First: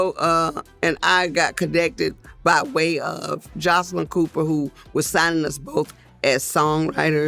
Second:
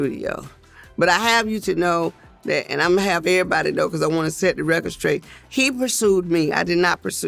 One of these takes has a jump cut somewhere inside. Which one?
second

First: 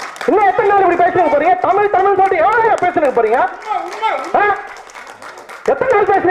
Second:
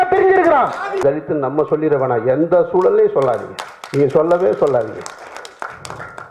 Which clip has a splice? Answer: second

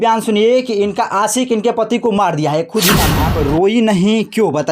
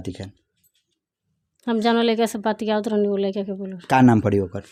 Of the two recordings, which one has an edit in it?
first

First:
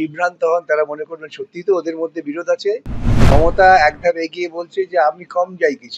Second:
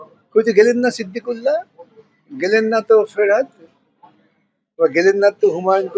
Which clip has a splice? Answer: first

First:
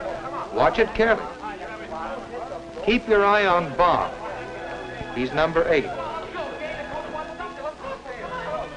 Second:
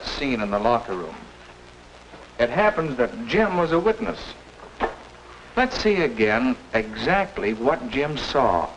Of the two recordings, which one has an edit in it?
first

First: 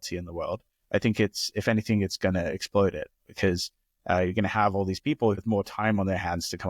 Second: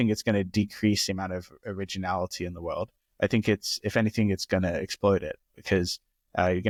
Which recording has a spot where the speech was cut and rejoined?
first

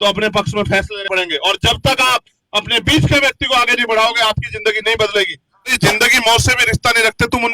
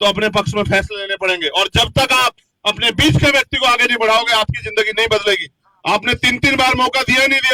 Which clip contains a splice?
first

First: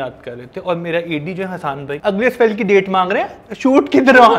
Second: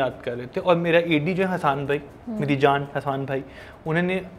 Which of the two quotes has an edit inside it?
first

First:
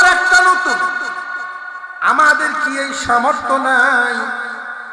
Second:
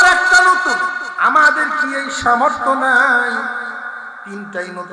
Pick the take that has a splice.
second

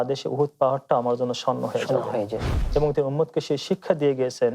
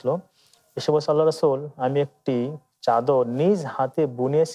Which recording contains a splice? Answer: first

